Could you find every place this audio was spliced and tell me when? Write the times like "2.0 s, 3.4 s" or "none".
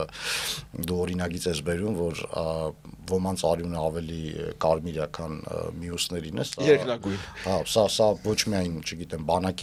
none